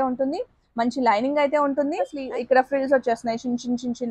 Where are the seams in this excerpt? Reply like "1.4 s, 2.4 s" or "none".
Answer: 2.2 s